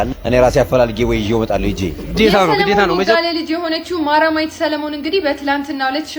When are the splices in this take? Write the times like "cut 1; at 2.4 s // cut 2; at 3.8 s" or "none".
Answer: cut 1; at 3.0 s